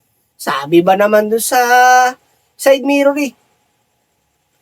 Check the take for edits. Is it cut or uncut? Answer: uncut